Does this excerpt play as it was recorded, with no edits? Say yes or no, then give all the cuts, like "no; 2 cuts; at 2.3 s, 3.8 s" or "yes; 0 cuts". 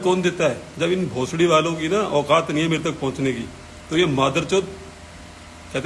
yes; 0 cuts